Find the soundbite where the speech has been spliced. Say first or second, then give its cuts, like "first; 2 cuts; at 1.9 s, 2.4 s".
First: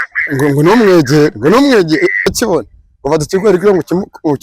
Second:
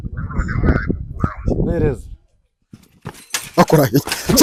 first; 1 cut; at 2.3 s